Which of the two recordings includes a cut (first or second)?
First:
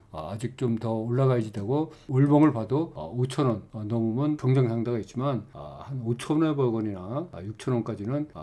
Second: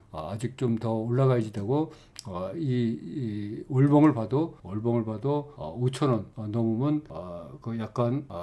first